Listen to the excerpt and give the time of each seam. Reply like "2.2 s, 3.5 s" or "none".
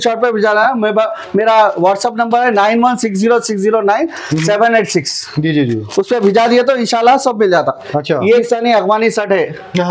8.4 s